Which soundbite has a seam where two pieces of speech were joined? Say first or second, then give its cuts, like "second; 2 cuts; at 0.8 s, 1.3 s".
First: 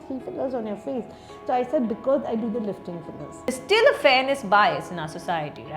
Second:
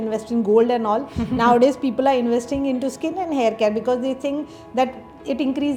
first; 1 cut; at 3.6 s